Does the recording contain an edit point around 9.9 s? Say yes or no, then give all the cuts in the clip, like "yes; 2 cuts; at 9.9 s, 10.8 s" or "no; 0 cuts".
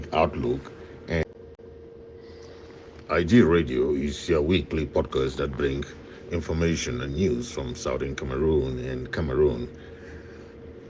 no; 1 cut; at 1.2 s